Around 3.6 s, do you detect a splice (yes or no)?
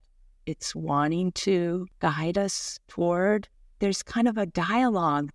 yes